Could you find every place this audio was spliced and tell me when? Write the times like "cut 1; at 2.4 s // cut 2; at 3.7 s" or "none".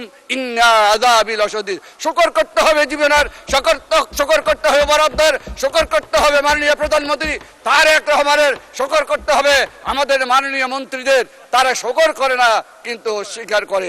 none

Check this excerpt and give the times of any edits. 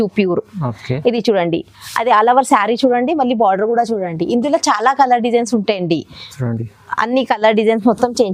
none

